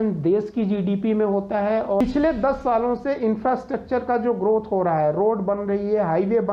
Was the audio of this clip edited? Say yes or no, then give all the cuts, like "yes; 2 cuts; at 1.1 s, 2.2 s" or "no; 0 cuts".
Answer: yes; 1 cut; at 2.0 s